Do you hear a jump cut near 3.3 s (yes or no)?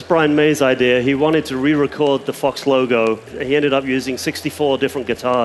yes